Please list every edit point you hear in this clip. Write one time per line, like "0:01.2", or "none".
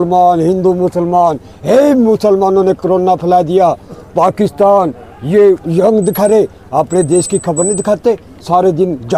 none